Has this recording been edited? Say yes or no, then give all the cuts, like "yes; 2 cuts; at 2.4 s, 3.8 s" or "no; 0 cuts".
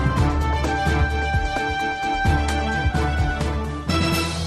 no; 0 cuts